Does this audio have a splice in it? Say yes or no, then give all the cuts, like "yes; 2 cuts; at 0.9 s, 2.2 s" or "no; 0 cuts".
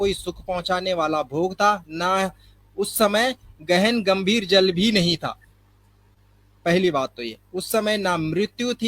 no; 0 cuts